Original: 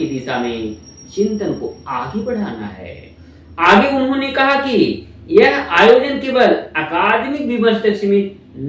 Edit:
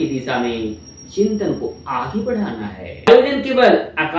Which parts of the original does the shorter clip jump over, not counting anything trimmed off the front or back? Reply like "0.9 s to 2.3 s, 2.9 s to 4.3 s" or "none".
3.1 s to 5.9 s